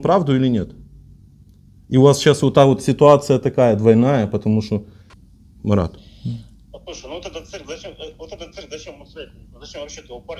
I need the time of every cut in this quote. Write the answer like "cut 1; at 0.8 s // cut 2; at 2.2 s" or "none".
cut 1; at 5.0 s